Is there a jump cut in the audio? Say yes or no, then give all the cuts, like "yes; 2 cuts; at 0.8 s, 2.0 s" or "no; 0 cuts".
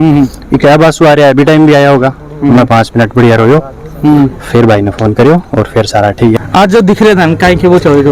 no; 0 cuts